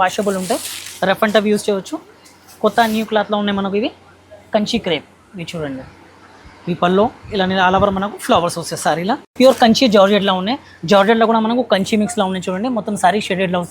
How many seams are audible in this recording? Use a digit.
1